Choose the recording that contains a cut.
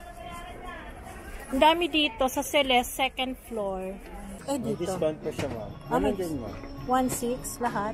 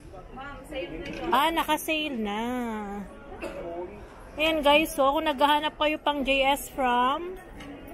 first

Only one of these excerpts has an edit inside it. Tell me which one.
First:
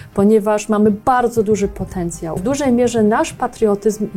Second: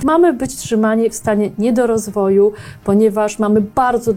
first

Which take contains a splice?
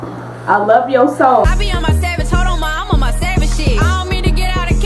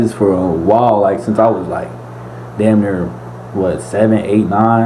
first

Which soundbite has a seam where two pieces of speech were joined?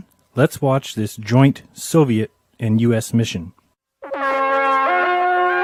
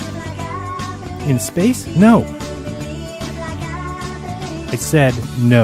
second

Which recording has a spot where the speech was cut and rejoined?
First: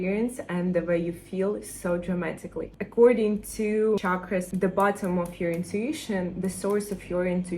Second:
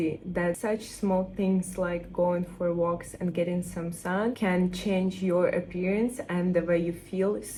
first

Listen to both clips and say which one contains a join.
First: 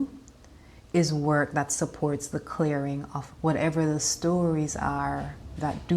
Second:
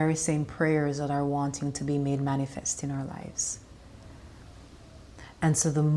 first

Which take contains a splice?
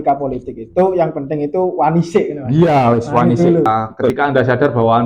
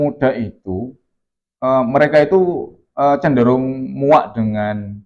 first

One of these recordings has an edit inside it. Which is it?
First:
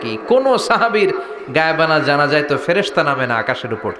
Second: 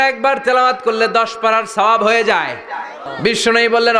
second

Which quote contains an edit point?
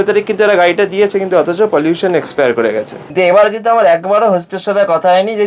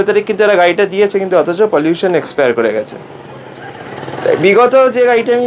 first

